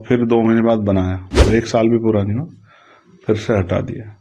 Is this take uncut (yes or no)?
no